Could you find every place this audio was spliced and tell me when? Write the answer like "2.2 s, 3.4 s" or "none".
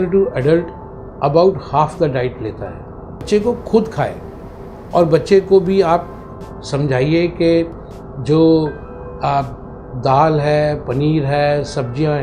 3.3 s